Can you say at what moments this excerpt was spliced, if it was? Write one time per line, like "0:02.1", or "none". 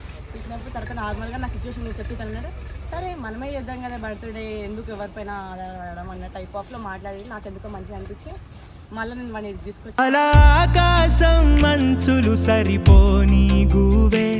none